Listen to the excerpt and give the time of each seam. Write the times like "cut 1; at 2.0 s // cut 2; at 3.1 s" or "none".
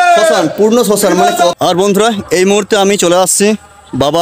cut 1; at 1.6 s